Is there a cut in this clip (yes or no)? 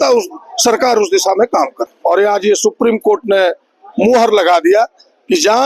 yes